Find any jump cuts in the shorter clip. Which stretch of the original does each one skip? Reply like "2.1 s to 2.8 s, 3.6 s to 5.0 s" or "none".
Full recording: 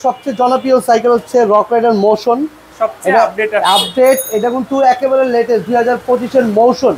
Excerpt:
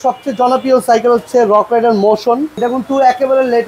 2.6 s to 4.4 s